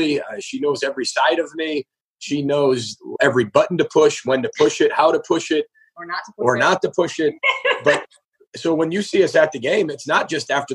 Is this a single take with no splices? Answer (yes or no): no